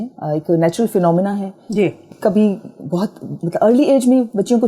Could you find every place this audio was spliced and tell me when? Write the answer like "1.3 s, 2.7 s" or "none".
2.0 s, 3.3 s